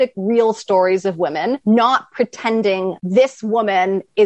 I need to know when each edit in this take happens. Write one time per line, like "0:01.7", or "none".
0:01.6
0:02.9